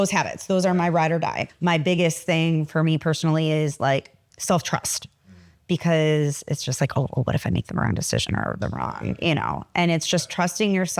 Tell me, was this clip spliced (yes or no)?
yes